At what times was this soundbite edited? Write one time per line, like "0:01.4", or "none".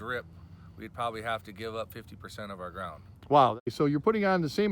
0:03.7